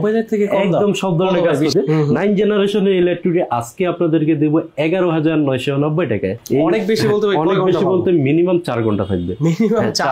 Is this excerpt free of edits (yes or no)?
no